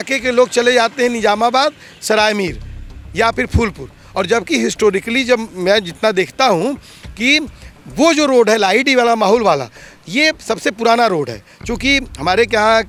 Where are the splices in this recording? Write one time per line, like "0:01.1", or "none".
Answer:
none